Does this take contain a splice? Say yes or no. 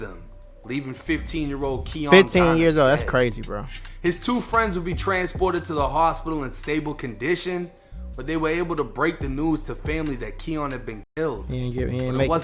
no